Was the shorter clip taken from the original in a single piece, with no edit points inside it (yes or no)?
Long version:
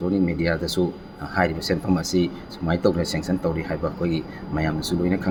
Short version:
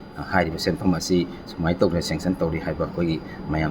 yes